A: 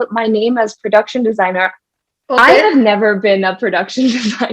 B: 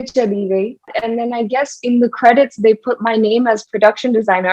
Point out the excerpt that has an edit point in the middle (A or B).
B